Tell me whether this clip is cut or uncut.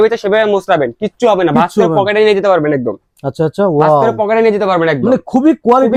uncut